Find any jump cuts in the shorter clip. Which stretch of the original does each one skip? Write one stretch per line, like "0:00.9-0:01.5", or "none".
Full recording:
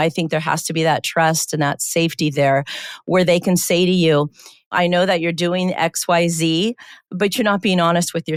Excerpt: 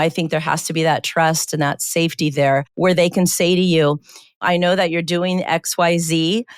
0:02.7-0:03.0

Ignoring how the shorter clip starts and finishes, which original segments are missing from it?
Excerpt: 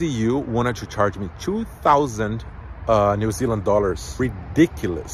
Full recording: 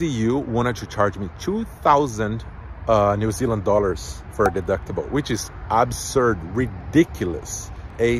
0:04.1-0:06.5

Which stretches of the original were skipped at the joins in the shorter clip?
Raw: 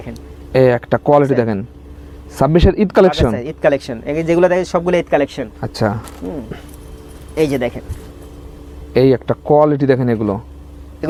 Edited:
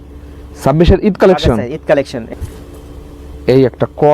0:04.0-0:07.8

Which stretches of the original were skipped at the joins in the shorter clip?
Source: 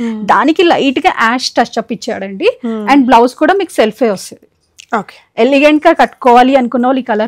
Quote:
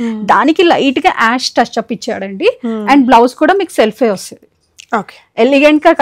none

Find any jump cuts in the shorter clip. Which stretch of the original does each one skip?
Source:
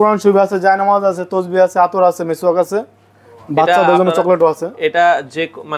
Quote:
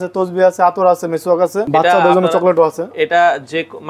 0:02.8-0:03.4

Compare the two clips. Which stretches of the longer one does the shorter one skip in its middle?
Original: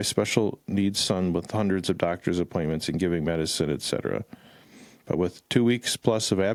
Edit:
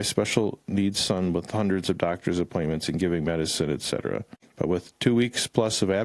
0:04.4-0:04.9

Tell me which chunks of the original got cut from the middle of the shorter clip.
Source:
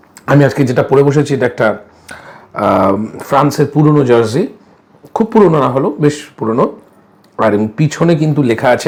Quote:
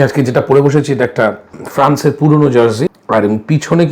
0:02.0-0:03.1
0:04.5-0:07.3

